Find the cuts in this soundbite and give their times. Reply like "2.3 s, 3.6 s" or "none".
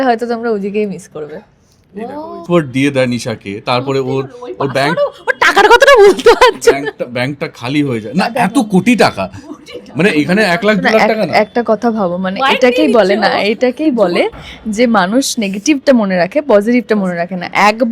2.4 s